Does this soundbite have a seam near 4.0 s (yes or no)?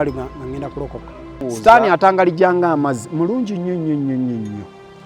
no